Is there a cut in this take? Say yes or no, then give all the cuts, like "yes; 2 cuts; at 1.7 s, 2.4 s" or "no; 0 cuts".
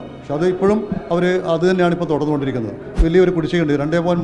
yes; 1 cut; at 2.9 s